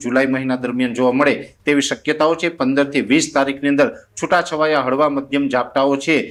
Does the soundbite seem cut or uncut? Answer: uncut